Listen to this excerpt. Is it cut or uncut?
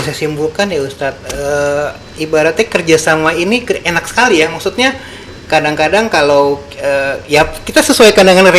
uncut